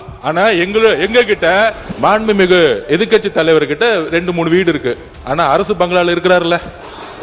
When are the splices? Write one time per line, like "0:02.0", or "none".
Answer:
0:01.8